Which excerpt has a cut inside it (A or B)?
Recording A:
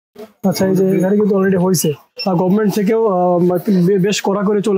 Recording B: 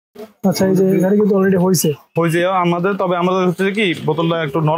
A